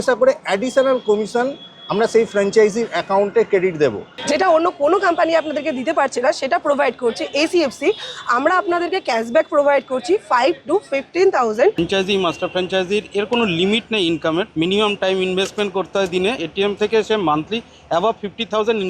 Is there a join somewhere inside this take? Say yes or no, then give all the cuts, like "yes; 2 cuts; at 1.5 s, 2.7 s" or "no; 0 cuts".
yes; 4 cuts; at 4.1 s, 11.8 s, 14.5 s, 16.5 s